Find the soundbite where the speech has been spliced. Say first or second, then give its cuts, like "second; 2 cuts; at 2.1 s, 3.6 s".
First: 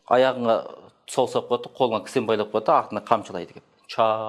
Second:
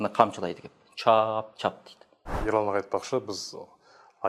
second; 1 cut; at 2.3 s